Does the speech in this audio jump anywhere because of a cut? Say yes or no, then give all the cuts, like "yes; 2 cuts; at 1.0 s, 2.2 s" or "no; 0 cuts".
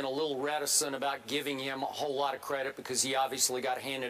no; 0 cuts